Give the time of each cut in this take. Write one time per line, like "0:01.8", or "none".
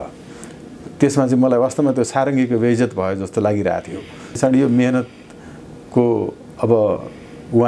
0:04.3